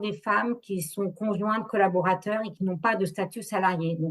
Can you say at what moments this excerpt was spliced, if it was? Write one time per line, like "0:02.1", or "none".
0:02.5